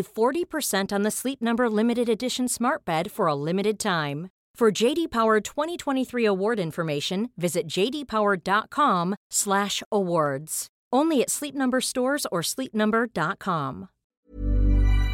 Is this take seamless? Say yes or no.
no